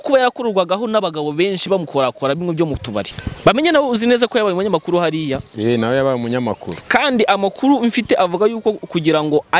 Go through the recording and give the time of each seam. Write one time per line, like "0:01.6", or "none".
0:03.2